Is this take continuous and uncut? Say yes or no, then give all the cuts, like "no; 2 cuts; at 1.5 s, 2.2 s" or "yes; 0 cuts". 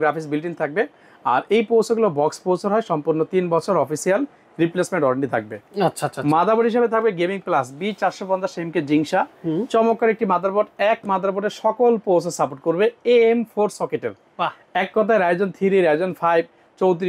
yes; 0 cuts